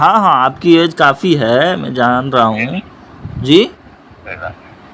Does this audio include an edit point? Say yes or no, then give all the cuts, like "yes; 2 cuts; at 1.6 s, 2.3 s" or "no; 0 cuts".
no; 0 cuts